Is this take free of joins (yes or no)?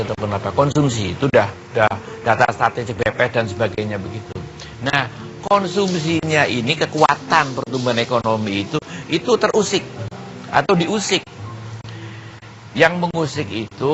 no